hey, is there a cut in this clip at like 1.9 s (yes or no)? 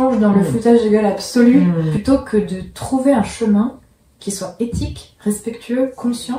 yes